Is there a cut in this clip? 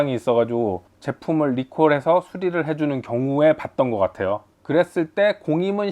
yes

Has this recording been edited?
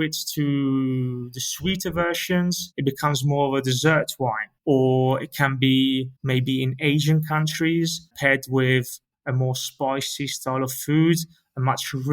yes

